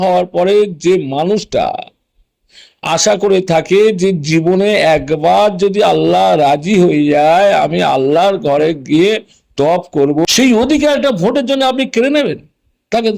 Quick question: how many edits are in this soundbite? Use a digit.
1